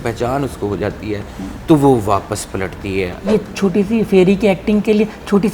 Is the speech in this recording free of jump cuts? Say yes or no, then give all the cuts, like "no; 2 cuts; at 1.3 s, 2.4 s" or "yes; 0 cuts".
no; 1 cut; at 3.3 s